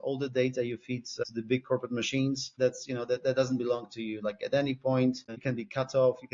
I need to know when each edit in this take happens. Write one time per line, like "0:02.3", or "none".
0:01.1
0:02.5
0:05.4